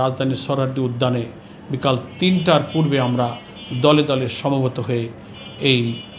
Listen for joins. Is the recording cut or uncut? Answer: uncut